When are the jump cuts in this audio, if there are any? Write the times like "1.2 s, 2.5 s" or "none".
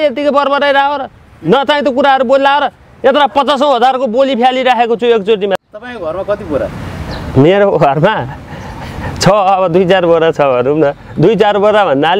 5.6 s